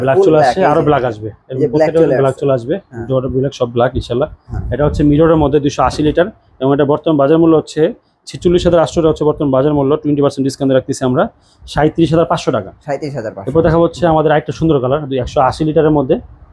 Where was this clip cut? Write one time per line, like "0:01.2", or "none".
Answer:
none